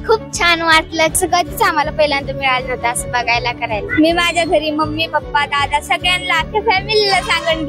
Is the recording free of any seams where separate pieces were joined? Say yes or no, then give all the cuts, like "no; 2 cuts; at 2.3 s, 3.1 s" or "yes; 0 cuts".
no; 2 cuts; at 1.1 s, 3.8 s